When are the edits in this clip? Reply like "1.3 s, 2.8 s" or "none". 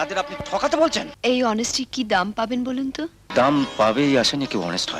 1.1 s, 3.2 s